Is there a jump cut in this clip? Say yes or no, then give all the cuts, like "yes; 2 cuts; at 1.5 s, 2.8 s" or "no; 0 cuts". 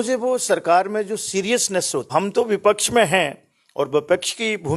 yes; 1 cut; at 2.1 s